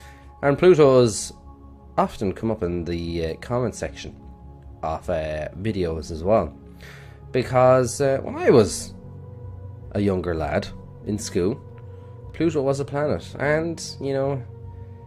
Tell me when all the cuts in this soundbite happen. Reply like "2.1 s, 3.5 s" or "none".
1.2 s